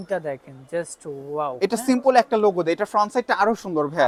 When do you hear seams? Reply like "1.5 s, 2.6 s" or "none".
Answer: none